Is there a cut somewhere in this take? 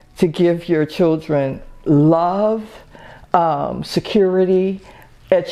no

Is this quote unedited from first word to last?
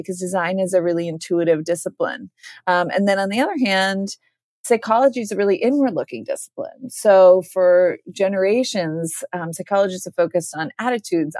yes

